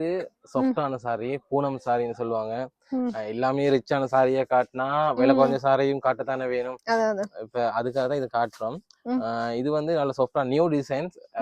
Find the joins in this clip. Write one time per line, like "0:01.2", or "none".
none